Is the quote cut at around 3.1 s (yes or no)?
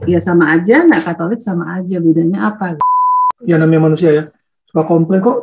yes